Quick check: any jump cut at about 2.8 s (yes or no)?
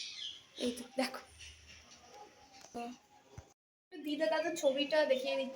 yes